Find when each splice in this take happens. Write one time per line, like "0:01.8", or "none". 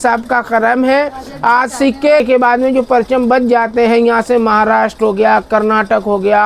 0:02.2